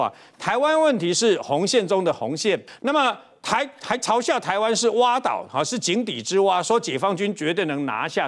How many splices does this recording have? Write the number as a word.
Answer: one